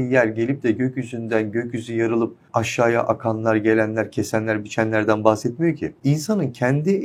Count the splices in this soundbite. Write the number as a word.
two